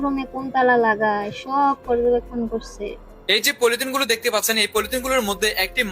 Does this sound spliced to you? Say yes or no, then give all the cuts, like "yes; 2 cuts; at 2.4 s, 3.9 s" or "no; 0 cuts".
yes; 1 cut; at 3.2 s